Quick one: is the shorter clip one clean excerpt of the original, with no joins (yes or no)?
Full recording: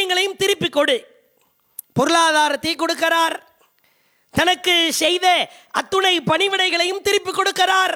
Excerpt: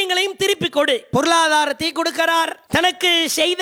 no